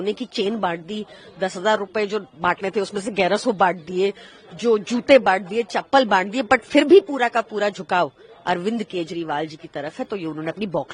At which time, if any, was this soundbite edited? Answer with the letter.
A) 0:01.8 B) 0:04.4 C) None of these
C